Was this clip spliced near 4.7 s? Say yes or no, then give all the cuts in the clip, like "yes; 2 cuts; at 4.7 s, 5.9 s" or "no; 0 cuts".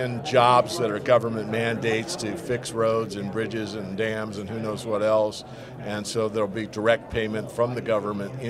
yes; 1 cut; at 4.7 s